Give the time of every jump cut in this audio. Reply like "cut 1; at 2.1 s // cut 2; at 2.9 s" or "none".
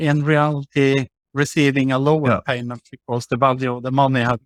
none